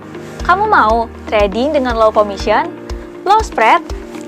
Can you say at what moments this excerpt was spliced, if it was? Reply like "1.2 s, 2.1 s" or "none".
2.6 s